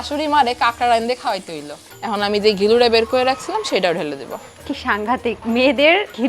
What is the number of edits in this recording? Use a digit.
2